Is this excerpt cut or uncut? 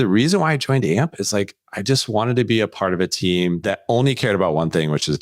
cut